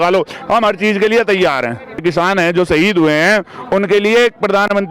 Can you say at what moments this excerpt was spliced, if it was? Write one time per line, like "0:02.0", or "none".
0:02.0